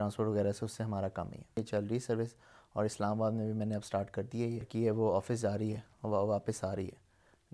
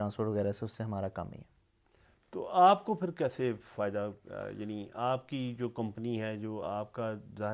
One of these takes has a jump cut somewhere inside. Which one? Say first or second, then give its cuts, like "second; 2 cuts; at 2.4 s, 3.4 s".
first; 2 cuts; at 1.6 s, 4.7 s